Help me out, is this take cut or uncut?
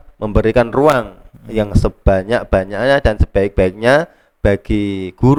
uncut